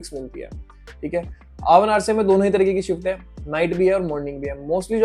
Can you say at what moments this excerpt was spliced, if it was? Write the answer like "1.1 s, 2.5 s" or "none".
none

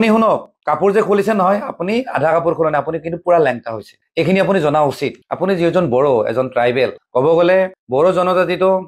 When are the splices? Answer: 5.2 s

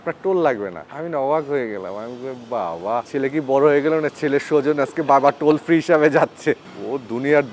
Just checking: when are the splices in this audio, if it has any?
6.6 s

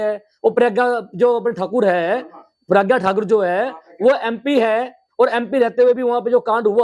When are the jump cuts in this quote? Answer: none

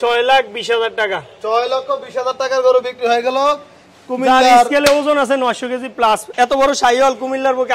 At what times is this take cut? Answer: none

